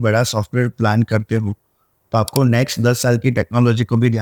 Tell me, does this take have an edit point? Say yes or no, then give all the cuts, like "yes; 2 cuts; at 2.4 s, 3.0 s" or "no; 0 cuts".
no; 0 cuts